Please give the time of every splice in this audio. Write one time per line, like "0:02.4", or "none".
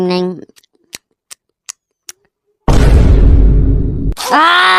none